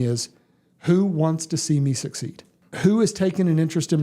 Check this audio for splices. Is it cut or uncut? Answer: cut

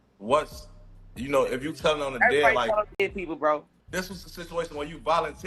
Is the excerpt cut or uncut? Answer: cut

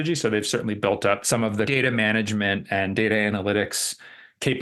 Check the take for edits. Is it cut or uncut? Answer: cut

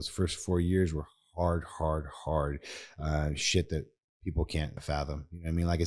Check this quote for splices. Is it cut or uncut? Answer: cut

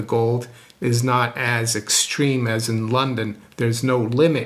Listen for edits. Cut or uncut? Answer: uncut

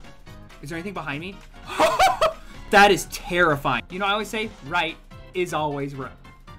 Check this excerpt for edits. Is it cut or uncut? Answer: cut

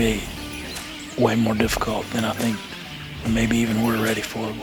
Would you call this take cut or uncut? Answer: uncut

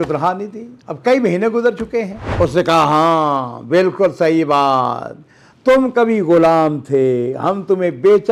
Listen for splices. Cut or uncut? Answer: cut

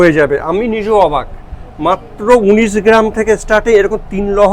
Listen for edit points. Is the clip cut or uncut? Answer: uncut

